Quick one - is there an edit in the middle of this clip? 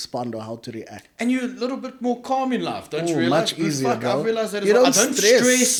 no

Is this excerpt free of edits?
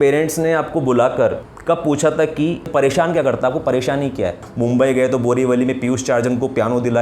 no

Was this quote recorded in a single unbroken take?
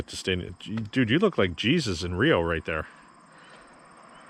yes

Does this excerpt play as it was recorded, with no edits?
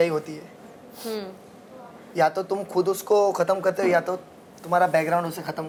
yes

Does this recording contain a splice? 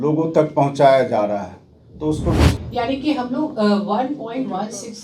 yes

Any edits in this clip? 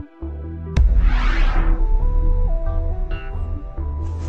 no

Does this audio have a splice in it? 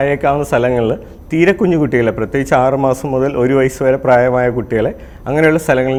no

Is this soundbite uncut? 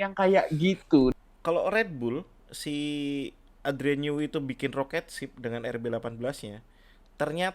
no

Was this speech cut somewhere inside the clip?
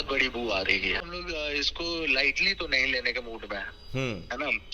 yes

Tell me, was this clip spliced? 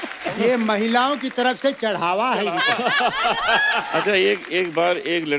yes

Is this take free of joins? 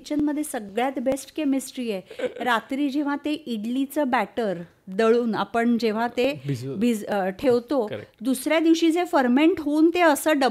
yes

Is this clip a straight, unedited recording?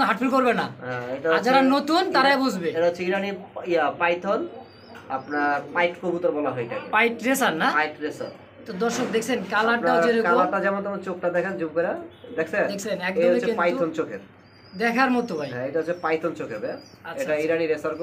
yes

